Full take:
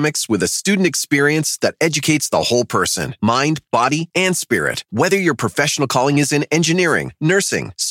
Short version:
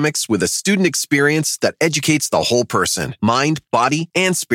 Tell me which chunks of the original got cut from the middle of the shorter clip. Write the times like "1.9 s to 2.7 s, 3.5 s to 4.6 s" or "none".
none